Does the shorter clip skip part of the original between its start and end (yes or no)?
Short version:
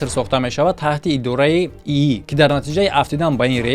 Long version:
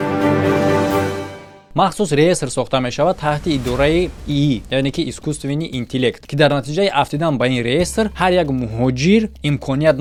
yes